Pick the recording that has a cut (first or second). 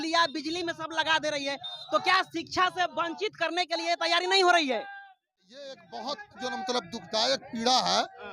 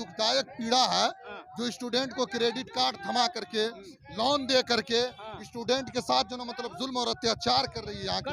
first